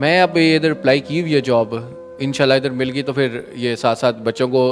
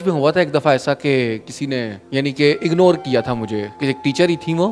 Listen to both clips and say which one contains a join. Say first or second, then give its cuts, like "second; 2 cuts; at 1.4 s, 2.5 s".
second; 2 cuts; at 2.0 s, 3.7 s